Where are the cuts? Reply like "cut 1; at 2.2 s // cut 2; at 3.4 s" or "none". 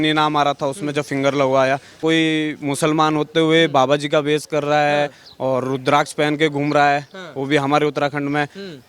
cut 1; at 2.0 s